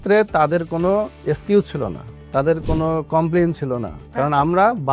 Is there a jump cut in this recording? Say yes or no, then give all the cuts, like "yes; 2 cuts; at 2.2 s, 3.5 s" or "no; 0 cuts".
yes; 2 cuts; at 1.2 s, 4.0 s